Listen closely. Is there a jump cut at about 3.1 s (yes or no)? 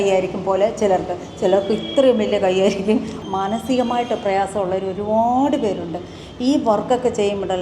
yes